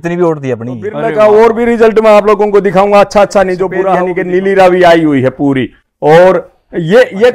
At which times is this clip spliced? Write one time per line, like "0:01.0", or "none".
0:01.1
0:04.0